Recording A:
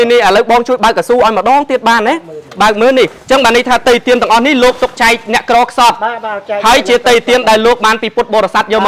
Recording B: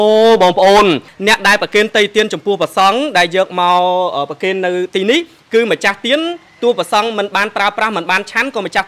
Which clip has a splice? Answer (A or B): B